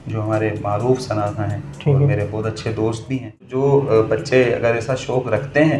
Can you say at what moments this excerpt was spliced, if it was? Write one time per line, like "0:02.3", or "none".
0:03.5